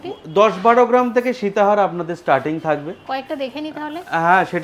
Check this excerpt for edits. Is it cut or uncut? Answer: uncut